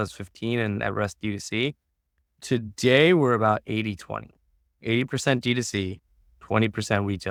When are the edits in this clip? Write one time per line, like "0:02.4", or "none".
none